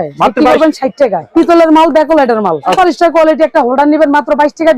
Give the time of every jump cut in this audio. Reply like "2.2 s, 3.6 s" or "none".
1.2 s, 2.7 s